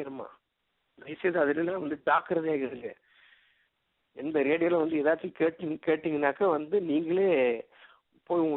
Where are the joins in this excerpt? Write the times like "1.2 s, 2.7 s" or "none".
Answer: none